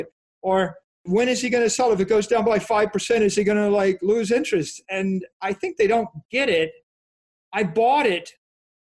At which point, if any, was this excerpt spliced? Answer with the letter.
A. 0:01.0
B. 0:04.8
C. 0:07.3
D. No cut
A